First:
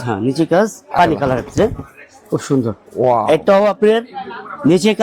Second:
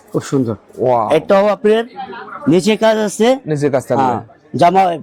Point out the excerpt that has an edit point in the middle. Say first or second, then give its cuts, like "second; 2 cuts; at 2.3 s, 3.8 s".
first; 1 cut; at 0.9 s